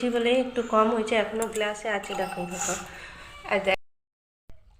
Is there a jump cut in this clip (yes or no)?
yes